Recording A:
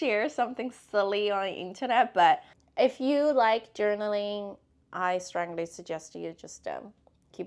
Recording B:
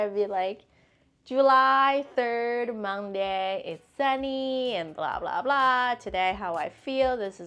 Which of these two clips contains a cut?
A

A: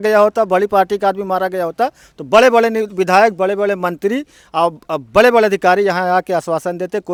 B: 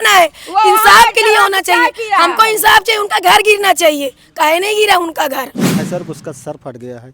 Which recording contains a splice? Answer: B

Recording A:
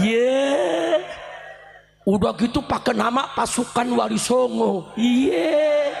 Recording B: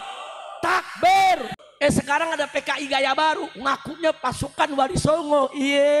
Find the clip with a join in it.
B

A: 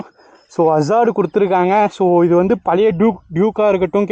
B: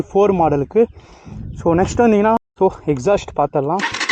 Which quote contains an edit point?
B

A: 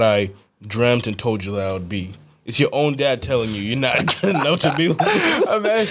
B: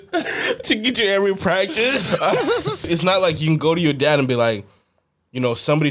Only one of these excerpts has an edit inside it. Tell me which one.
B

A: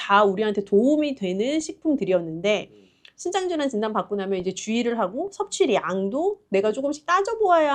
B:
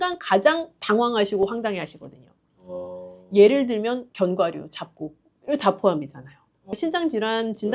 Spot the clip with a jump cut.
B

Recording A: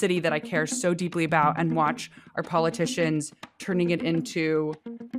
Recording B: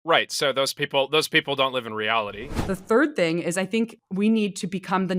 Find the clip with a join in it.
B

